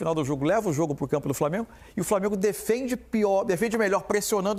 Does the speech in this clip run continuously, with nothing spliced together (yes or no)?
yes